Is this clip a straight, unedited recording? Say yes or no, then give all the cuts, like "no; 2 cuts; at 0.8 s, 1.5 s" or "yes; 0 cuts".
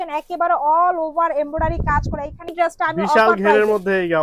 no; 1 cut; at 2.5 s